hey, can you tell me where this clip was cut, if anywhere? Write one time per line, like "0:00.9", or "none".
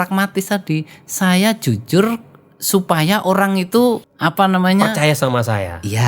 0:04.1